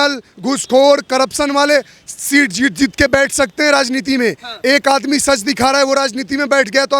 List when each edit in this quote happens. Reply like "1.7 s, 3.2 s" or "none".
none